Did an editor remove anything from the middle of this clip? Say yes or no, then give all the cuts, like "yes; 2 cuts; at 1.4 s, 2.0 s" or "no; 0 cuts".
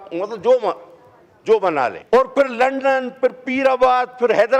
yes; 1 cut; at 2.0 s